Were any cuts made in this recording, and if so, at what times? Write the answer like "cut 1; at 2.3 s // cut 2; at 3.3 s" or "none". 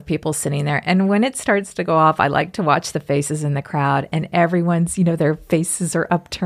none